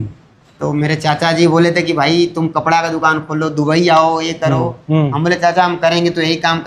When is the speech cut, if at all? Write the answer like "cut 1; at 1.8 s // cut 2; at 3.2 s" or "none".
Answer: none